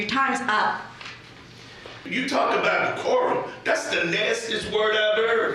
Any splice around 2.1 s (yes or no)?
yes